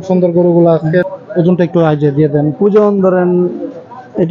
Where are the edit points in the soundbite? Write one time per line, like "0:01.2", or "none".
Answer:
none